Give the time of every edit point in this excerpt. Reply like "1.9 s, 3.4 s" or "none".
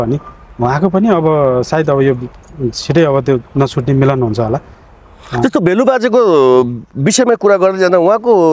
none